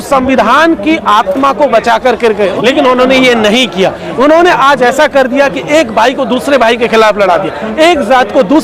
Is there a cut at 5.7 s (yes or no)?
no